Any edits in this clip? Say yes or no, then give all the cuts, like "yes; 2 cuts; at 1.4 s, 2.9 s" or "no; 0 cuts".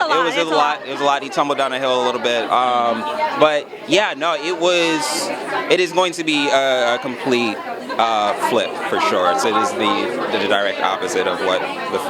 no; 0 cuts